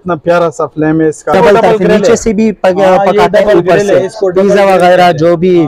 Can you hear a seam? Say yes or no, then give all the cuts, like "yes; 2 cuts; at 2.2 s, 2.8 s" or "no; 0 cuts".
yes; 1 cut; at 1.3 s